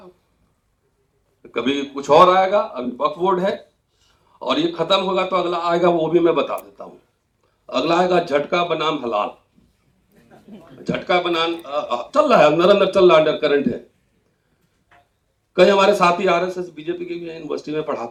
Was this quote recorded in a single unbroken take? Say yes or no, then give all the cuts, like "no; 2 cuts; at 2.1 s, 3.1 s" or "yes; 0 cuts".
yes; 0 cuts